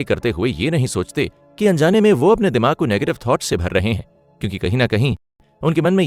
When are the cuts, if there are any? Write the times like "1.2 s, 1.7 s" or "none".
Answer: none